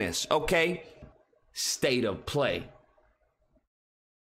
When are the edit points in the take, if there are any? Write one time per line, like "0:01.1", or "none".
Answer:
0:01.0